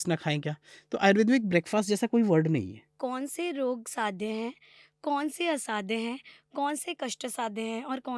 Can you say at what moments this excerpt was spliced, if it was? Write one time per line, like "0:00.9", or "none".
0:02.9